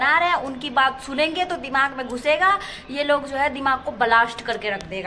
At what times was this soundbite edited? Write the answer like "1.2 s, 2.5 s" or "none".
none